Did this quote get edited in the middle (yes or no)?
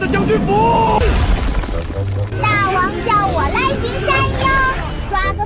yes